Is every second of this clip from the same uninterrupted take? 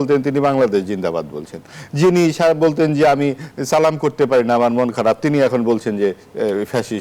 yes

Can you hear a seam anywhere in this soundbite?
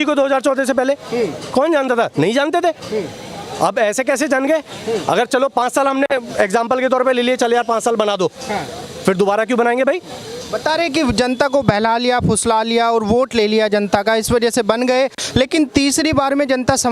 no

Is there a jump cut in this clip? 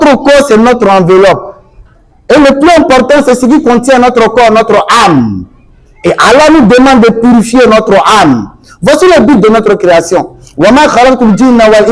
no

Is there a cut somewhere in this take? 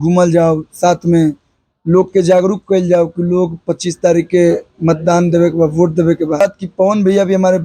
yes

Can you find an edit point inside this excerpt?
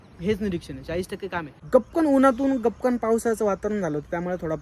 yes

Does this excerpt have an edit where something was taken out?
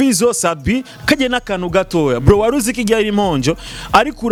no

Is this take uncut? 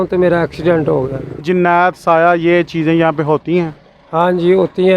no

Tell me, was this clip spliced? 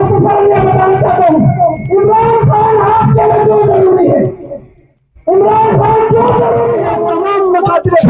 yes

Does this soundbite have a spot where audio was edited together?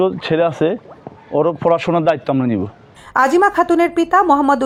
no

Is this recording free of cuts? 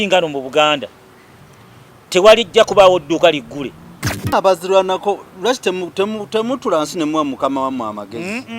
no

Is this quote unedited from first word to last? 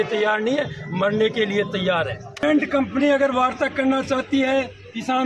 no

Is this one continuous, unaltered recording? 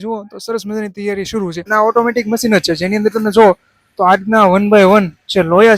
no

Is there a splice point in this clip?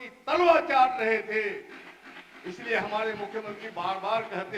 no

